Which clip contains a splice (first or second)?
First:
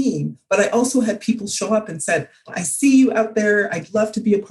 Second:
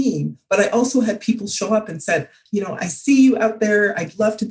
first